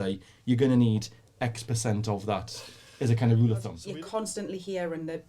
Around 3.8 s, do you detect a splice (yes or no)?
yes